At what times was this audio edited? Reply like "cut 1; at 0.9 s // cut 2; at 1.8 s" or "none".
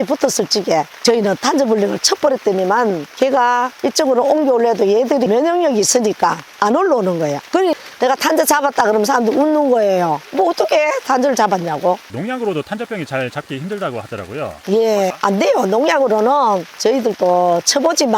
none